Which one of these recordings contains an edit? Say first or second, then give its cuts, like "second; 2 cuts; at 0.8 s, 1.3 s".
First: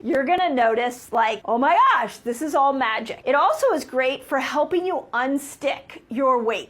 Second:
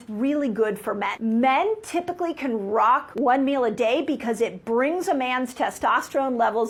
first; 1 cut; at 3.2 s